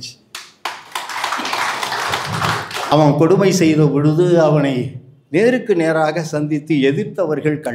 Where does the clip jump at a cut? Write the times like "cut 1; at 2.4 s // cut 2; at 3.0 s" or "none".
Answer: cut 1; at 2.9 s